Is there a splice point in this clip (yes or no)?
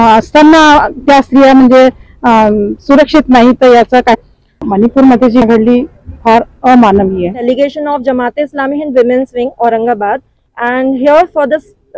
yes